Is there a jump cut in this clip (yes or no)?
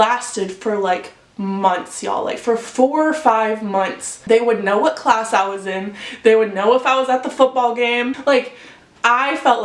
yes